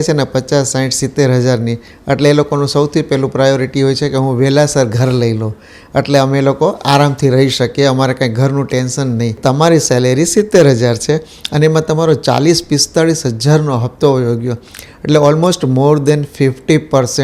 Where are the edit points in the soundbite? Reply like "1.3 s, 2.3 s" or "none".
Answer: 9.4 s